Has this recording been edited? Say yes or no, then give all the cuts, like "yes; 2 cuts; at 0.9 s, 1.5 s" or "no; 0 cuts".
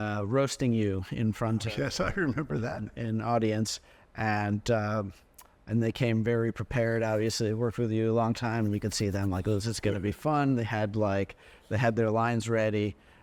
no; 0 cuts